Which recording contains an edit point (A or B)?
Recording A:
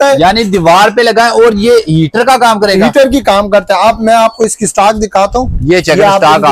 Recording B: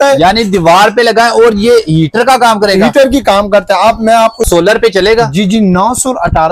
B